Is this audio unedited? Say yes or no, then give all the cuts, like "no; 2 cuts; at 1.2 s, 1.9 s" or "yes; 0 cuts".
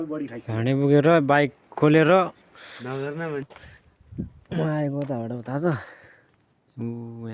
no; 1 cut; at 3.5 s